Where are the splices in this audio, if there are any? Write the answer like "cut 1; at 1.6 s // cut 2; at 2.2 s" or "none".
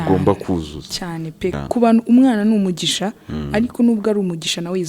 cut 1; at 1.6 s